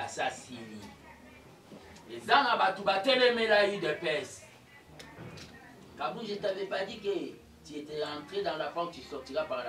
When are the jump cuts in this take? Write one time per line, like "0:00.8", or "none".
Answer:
none